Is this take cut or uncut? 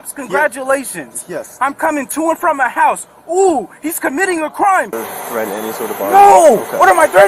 cut